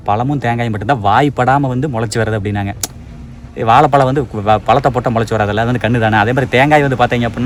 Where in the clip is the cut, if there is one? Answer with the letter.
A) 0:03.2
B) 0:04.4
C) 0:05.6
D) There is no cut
D